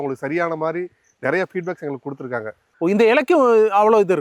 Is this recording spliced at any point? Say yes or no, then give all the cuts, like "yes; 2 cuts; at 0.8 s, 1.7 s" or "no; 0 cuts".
yes; 1 cut; at 2.5 s